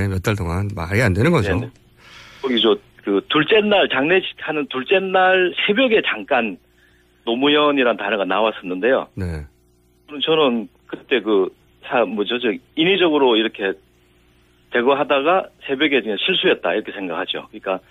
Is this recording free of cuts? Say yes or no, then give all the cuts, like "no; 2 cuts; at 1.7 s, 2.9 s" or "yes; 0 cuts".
no; 1 cut; at 5.7 s